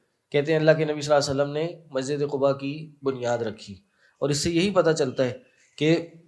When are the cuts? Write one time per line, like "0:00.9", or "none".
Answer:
none